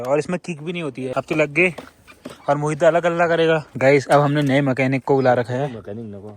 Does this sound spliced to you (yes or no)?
yes